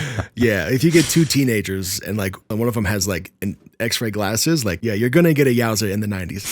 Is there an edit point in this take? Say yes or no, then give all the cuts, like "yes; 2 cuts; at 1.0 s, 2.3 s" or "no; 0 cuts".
yes; 2 cuts; at 2.5 s, 4.8 s